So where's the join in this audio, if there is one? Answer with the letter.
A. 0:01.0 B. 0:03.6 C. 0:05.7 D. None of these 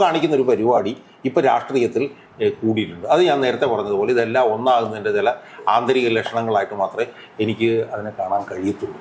D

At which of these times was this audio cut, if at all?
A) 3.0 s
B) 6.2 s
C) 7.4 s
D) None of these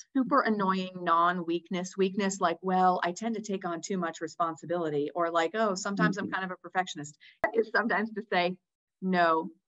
C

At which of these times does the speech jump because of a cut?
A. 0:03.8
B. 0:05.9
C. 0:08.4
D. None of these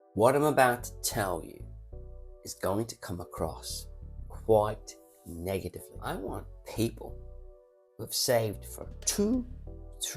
B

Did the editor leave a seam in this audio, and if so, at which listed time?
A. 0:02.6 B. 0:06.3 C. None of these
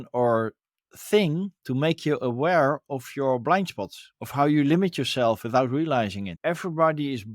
B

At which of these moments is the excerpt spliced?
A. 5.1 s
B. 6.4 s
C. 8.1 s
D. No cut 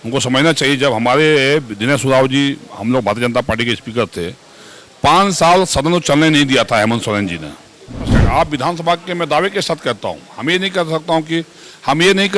C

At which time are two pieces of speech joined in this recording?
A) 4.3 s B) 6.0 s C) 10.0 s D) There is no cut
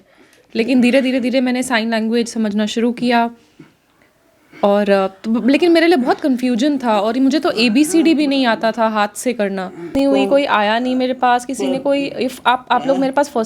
C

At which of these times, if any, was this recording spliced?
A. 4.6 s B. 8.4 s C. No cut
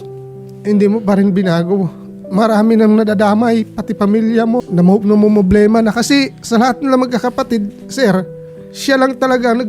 A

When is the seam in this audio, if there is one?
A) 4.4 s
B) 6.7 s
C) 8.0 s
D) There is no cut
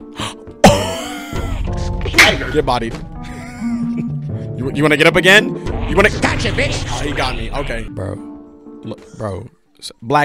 C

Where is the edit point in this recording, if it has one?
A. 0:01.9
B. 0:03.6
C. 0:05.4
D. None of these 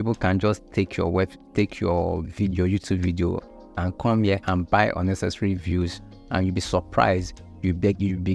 D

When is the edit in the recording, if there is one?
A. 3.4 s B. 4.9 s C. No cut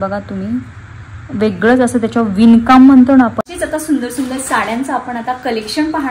A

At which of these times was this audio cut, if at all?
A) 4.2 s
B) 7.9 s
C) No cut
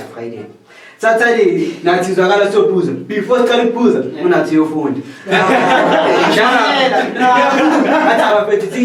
C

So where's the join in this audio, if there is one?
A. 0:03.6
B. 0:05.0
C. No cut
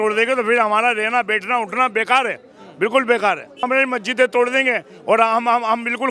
A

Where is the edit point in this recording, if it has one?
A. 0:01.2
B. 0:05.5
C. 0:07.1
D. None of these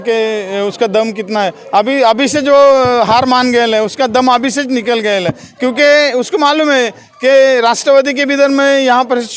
D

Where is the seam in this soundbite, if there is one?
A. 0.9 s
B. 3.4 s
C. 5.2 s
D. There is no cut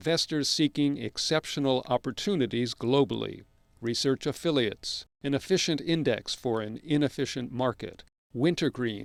D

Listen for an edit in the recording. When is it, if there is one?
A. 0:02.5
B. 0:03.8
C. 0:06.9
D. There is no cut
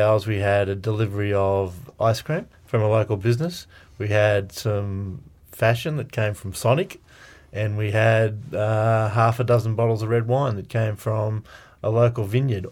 A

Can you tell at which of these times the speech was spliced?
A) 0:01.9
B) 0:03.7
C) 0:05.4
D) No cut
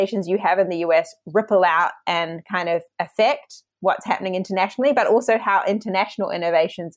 D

